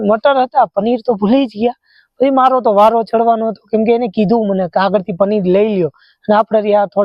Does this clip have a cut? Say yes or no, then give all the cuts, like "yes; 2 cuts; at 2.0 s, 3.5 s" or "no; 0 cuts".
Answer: no; 0 cuts